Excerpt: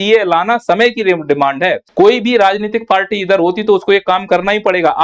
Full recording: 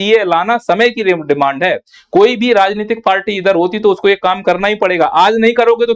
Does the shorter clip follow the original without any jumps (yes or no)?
no